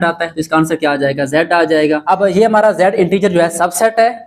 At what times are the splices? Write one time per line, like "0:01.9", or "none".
0:02.0